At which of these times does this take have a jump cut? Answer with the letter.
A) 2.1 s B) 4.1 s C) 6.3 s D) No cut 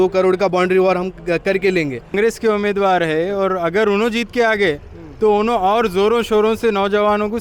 A